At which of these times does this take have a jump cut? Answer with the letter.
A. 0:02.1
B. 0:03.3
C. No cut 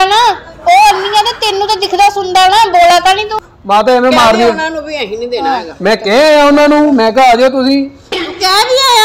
B